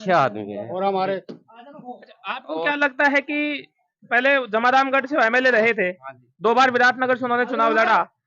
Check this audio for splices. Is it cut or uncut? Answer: uncut